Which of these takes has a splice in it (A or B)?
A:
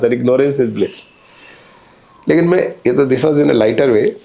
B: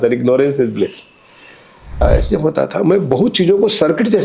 B